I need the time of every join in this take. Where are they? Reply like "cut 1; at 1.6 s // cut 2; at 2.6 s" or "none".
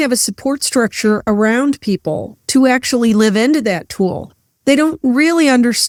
none